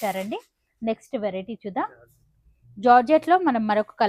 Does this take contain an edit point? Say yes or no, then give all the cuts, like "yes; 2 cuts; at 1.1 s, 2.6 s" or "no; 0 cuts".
no; 0 cuts